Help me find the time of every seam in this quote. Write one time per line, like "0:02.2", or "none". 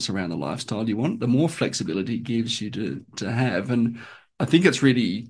none